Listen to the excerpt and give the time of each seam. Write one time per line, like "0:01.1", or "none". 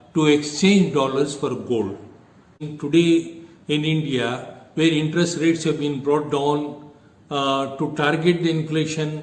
0:02.7